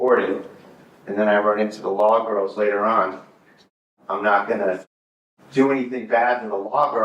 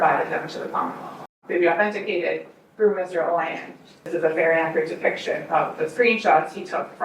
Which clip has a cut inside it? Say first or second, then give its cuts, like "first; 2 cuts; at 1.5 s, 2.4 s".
second; 2 cuts; at 1.3 s, 4.1 s